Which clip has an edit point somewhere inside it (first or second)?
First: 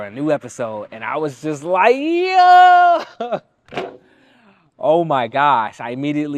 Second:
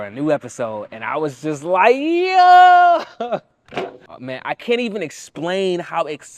second